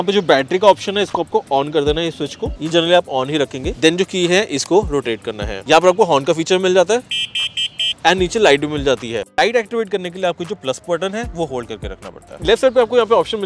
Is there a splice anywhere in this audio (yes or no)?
no